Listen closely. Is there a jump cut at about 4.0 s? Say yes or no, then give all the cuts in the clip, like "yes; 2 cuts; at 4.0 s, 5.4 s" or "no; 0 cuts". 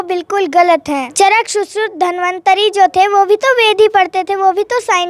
no; 1 cut; at 1.1 s